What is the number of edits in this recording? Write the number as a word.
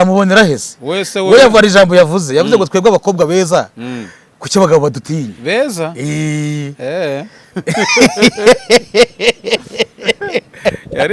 zero